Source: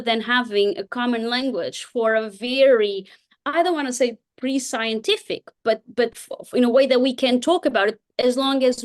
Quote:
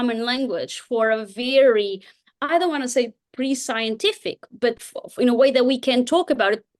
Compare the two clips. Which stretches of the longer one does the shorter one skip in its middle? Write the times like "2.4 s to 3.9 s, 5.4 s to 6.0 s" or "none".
5.5 s to 5.9 s